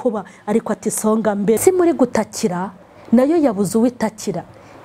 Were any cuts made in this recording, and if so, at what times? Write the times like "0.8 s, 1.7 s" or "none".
1.6 s